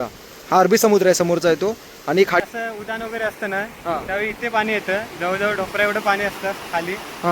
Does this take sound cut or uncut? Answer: cut